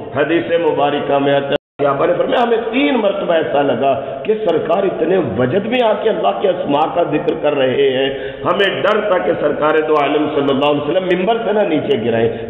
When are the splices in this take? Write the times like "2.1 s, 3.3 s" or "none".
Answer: 1.7 s